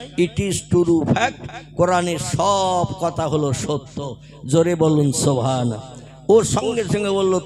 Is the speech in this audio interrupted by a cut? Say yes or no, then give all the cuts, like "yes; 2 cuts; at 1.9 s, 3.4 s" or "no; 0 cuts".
no; 0 cuts